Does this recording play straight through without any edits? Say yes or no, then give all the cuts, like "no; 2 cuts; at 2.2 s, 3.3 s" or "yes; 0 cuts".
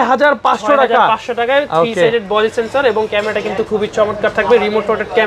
yes; 0 cuts